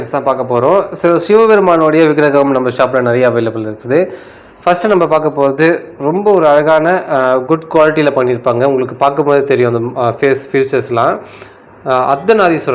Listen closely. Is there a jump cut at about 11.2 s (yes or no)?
no